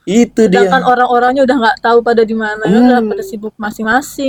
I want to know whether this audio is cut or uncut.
uncut